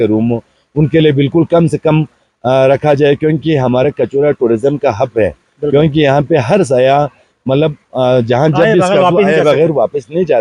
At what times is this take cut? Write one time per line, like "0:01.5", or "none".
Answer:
none